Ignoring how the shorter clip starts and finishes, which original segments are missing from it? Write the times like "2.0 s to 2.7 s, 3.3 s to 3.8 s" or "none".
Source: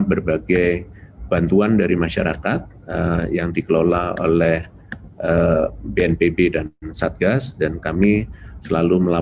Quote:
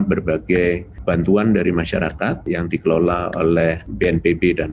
0.9 s to 1.1 s, 2.7 s to 3.3 s, 4.7 s to 5.8 s